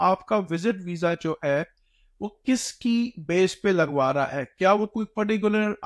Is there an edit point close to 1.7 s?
no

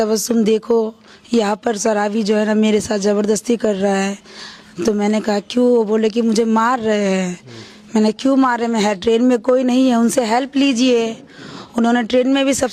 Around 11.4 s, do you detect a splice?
no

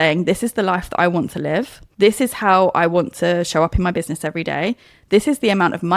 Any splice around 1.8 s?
yes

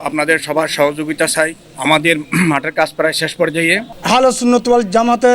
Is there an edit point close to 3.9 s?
yes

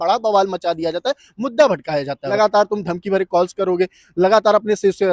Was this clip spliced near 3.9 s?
no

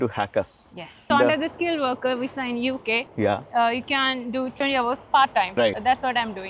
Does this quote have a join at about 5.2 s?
no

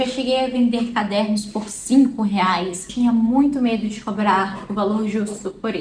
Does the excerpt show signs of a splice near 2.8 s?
yes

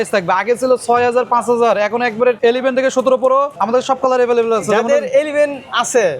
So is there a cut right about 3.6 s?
yes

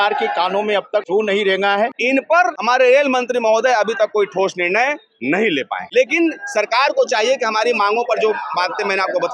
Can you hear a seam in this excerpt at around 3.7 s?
no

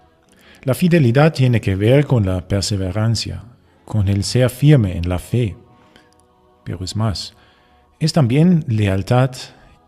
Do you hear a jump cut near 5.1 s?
no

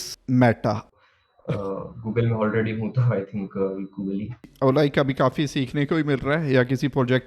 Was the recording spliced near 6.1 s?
no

